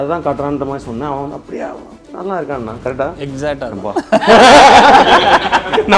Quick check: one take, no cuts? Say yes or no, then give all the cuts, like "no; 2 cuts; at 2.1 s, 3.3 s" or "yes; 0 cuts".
yes; 0 cuts